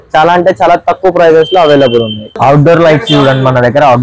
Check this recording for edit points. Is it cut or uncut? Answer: cut